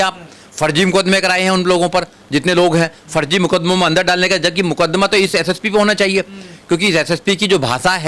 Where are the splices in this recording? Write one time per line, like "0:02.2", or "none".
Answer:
none